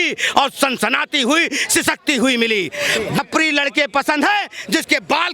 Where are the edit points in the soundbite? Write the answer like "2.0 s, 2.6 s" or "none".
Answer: 3.2 s